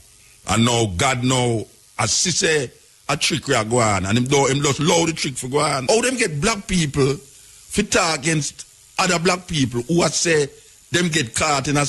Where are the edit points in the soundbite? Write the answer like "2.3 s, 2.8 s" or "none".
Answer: 5.8 s